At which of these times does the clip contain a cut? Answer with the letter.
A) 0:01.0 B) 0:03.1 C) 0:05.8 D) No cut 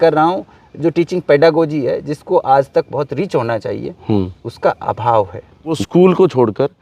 C